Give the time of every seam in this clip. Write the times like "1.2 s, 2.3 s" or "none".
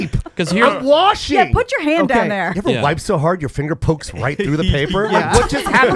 2.5 s